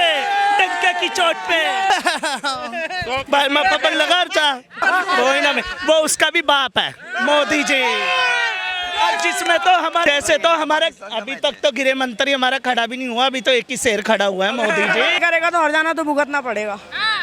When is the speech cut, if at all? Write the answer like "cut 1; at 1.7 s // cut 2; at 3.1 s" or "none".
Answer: cut 1; at 1.9 s // cut 2; at 4.8 s // cut 3; at 10.1 s // cut 4; at 15.2 s